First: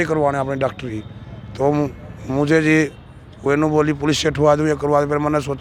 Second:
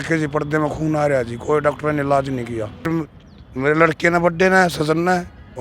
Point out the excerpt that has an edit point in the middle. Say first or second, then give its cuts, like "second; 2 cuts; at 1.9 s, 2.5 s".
second; 1 cut; at 2.9 s